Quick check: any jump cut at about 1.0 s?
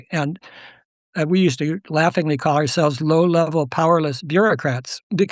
yes; 1 cut; at 1.0 s

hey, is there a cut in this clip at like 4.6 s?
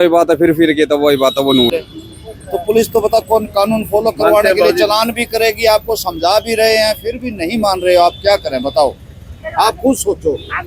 no; 1 cut; at 1.7 s

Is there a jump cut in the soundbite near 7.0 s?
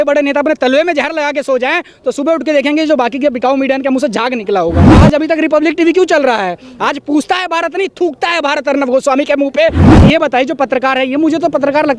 no; 2 cuts; at 4.9 s, 9.8 s

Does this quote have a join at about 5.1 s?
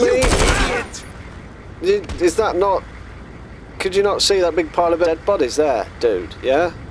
yes; 1 cut; at 5.1 s

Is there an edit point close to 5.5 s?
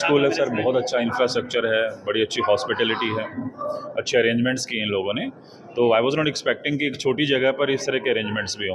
no; 0 cuts

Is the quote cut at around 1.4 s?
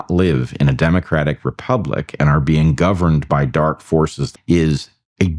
no; 1 cut; at 4.2 s

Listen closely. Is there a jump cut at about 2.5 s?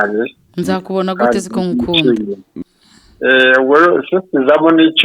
yes; 1 cut; at 2.5 s

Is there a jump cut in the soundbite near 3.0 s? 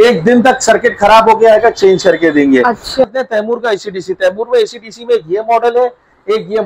yes; 1 cut; at 3.0 s

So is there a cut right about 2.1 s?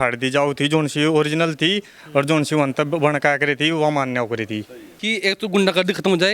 no; 1 cut; at 5.0 s

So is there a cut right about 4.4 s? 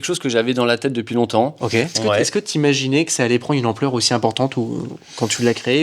no; 1 cut; at 2.0 s

